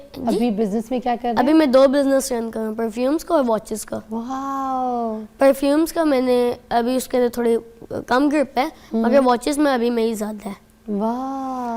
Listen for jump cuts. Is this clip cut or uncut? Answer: uncut